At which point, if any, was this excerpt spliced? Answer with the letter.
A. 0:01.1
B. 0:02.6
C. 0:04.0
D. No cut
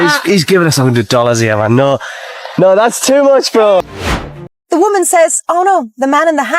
C